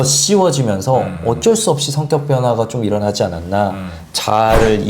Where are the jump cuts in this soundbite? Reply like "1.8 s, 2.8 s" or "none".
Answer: none